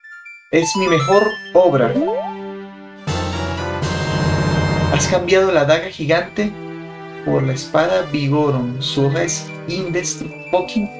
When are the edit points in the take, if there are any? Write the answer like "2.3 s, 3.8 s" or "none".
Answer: none